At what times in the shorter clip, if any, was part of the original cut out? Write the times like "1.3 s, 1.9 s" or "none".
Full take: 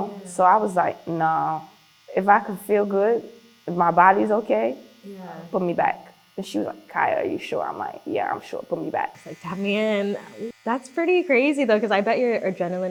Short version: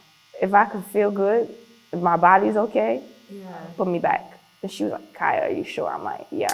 none

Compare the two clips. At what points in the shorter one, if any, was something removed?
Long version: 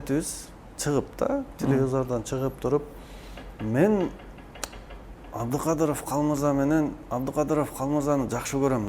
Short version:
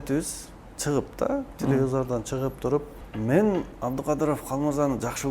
3.0 s, 3.7 s

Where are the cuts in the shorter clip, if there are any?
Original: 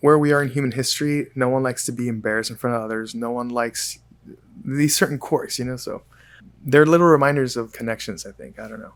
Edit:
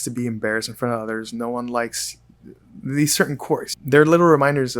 3.7 s

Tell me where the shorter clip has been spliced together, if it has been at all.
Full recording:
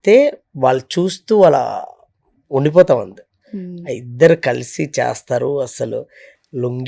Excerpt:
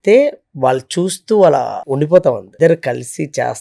1.8 s, 2.5 s

